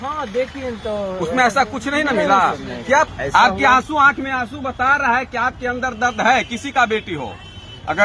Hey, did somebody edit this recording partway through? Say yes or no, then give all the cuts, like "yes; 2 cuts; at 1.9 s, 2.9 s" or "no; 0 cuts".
yes; 1 cut; at 3.1 s